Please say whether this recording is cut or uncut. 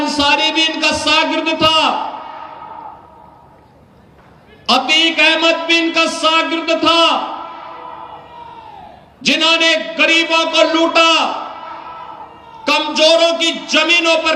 uncut